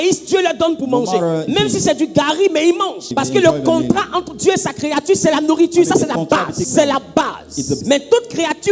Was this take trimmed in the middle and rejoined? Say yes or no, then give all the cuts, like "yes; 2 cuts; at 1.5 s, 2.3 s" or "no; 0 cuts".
yes; 4 cuts; at 1.4 s, 3.1 s, 6.7 s, 7.8 s